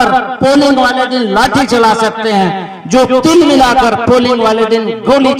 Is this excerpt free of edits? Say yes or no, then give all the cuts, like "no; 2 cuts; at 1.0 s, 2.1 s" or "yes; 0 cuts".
yes; 0 cuts